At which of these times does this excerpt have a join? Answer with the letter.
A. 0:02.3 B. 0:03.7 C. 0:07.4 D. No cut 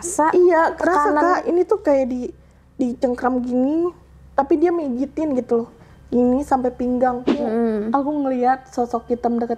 C